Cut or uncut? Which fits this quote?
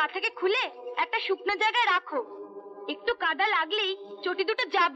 uncut